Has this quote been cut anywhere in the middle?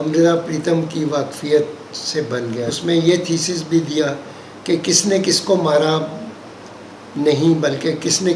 yes; 1 cut; at 2.7 s

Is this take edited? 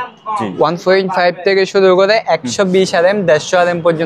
no; 0 cuts

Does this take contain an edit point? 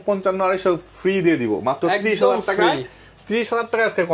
no; 0 cuts

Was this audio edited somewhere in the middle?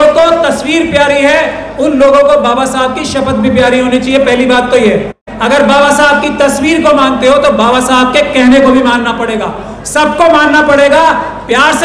yes; 1 cut; at 5.3 s

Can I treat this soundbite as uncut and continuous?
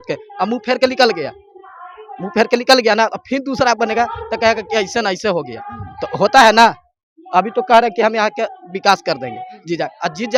yes; 0 cuts

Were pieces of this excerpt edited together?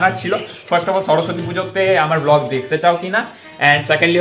no; 0 cuts

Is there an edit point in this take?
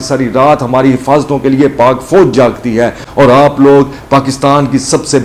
no; 0 cuts

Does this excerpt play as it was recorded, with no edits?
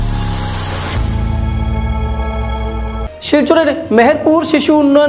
no; 1 cut; at 3.0 s

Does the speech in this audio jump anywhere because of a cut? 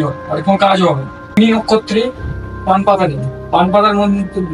yes; 1 cut; at 1.4 s

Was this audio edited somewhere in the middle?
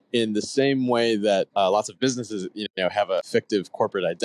yes; 2 cuts; at 1.5 s, 3.3 s

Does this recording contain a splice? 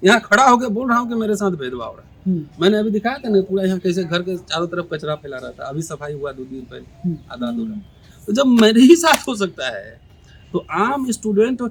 no; 0 cuts

